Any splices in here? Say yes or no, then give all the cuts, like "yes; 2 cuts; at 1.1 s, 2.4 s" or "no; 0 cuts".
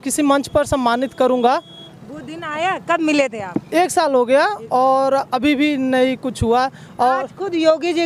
no; 0 cuts